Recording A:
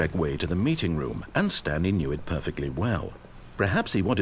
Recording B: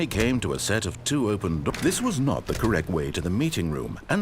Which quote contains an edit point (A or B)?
B